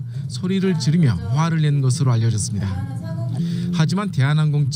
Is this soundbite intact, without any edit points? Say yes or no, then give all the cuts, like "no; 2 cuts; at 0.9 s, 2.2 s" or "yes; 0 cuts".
yes; 0 cuts